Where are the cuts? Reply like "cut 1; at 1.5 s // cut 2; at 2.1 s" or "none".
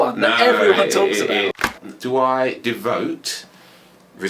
cut 1; at 1.6 s